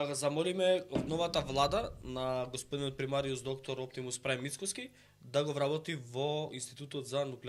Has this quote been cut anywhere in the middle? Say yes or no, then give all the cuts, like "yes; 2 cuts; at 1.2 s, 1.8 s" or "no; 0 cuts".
no; 0 cuts